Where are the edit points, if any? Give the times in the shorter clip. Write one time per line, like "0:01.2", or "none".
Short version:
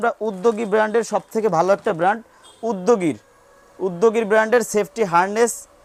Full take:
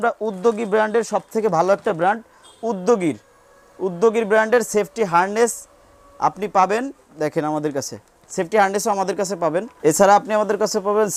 none